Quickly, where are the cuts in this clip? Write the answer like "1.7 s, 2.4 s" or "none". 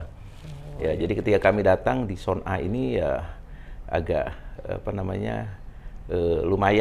none